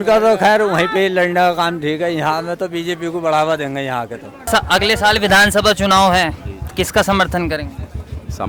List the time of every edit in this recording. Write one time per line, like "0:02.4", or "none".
0:04.5